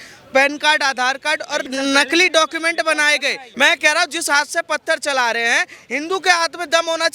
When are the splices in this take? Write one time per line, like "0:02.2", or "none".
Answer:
0:01.7
0:03.4

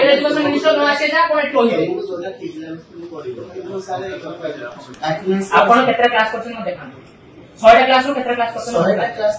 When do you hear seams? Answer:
0:04.8

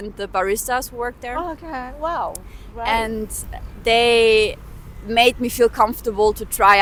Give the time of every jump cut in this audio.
none

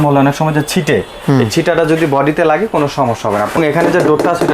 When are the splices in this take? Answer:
0:03.6

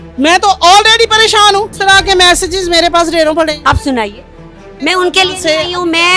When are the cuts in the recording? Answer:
0:01.7
0:04.6

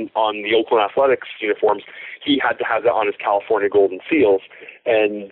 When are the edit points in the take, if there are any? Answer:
none

